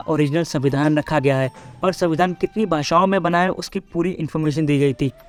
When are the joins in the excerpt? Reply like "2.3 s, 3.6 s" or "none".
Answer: none